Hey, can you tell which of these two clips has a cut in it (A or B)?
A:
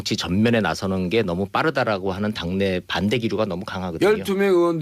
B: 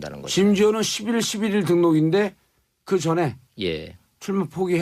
B